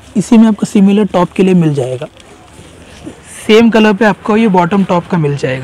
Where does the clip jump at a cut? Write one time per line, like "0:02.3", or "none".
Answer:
none